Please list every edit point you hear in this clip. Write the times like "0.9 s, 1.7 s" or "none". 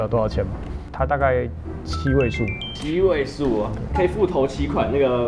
none